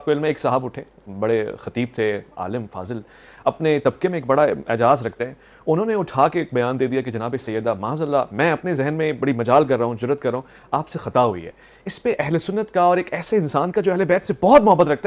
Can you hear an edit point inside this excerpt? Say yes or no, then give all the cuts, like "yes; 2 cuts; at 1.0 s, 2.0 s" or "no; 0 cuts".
no; 0 cuts